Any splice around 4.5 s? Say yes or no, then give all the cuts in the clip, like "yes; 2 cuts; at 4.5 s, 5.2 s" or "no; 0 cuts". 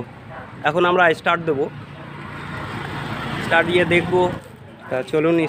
yes; 1 cut; at 4.5 s